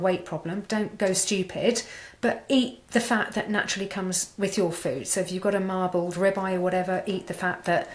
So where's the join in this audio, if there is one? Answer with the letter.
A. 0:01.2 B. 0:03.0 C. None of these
C